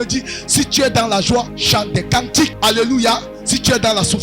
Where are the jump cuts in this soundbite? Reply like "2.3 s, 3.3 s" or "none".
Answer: 1.6 s, 2.5 s